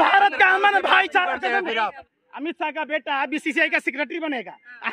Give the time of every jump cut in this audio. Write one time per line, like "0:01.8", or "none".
0:02.0